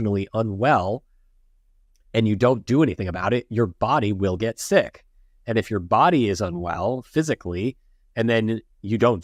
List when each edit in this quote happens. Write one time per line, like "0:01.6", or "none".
none